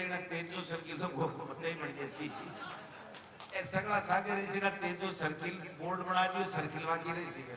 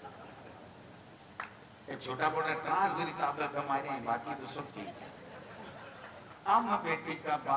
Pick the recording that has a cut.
second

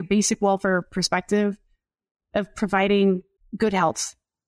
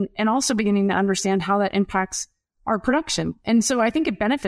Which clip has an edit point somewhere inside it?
first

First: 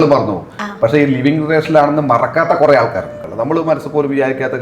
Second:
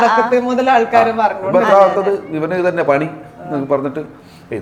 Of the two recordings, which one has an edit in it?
first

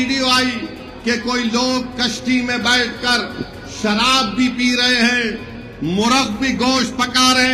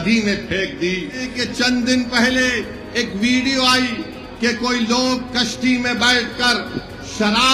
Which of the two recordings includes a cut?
second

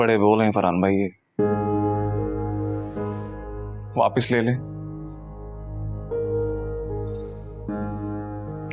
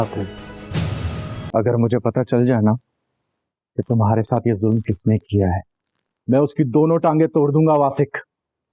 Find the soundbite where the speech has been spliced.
second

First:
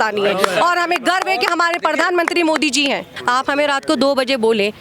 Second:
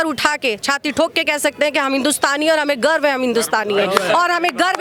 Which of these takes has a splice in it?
first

